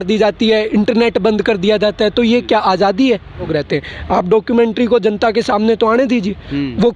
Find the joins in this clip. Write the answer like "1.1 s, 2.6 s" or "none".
3.5 s